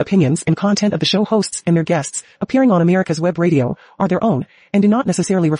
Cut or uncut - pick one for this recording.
uncut